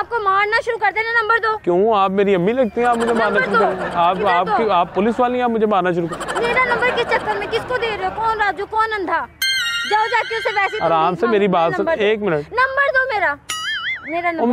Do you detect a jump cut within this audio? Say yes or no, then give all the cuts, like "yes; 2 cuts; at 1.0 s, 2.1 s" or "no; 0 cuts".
no; 0 cuts